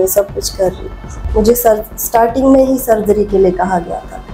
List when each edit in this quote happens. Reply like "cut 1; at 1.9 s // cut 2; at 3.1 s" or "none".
cut 1; at 1.1 s